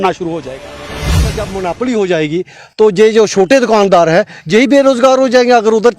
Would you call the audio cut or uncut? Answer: cut